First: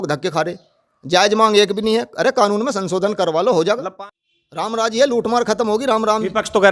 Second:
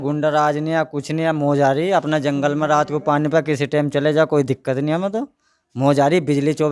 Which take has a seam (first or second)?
first